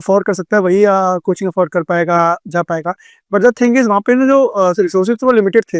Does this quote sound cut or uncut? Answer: uncut